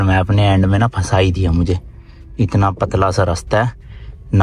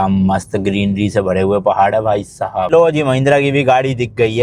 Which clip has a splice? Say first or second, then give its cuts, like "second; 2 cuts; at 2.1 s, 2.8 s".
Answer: second; 1 cut; at 2.7 s